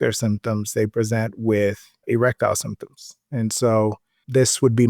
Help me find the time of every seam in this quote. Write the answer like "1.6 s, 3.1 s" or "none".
2.0 s